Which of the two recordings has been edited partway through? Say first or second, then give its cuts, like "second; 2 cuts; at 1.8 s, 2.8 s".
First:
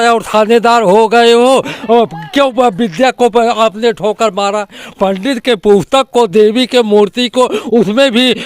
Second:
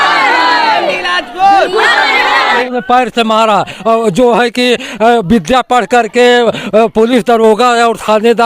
second; 1 cut; at 2.7 s